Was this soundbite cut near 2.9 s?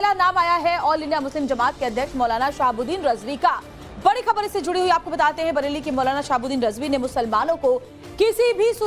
no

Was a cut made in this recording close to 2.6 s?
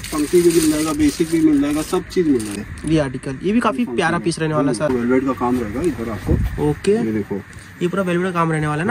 yes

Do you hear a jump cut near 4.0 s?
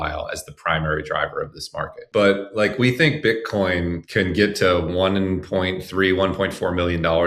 yes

